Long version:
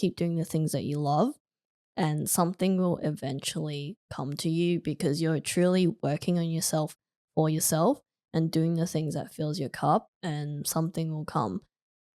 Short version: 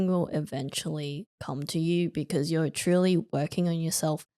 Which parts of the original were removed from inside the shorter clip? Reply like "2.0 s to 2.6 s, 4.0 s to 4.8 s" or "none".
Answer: none